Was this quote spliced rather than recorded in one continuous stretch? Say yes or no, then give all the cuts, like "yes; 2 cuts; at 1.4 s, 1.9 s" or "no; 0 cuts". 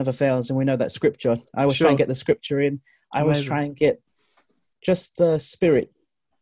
no; 0 cuts